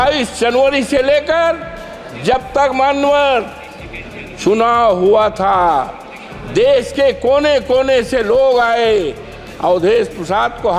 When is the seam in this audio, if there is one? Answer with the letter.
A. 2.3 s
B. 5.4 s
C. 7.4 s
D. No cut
D